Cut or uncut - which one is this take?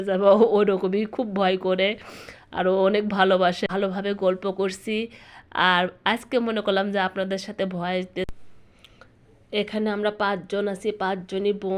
cut